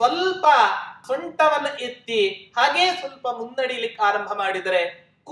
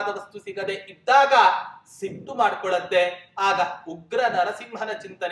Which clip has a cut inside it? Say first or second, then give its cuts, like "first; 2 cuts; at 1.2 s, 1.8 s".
first; 1 cut; at 1.0 s